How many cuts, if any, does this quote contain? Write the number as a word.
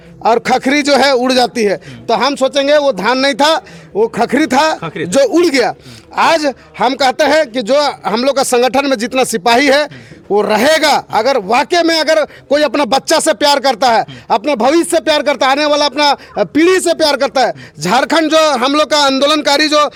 zero